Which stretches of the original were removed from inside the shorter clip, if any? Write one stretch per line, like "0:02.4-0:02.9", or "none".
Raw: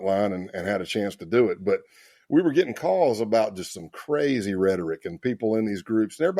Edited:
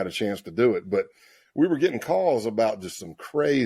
none